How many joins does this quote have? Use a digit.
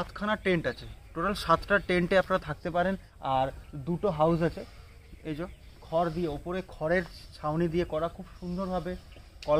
1